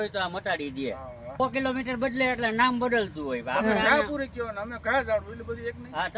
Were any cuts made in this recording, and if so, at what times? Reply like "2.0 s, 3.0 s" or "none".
1.4 s

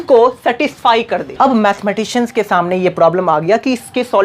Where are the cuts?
1.3 s

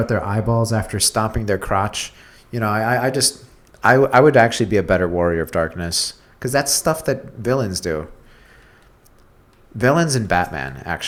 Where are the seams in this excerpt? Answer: none

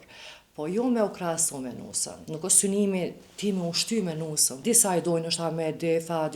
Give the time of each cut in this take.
2.2 s, 4.5 s

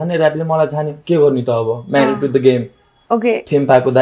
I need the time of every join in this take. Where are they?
none

